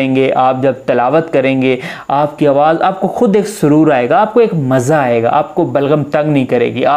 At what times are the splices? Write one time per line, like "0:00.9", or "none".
none